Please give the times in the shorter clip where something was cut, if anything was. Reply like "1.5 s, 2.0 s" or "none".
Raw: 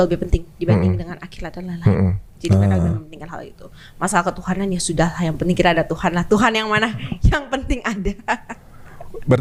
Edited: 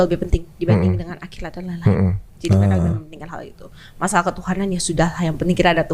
none